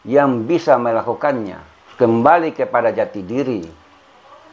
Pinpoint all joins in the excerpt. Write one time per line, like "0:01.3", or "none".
0:01.9